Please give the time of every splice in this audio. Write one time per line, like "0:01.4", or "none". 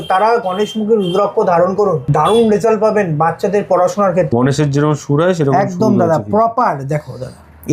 0:02.0
0:04.3